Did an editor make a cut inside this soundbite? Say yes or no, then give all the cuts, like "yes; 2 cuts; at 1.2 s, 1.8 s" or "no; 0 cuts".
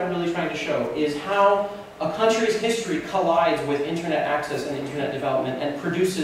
yes; 1 cut; at 2.5 s